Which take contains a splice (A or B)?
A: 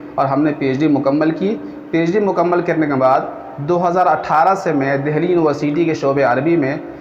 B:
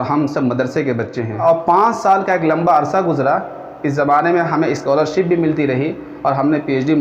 B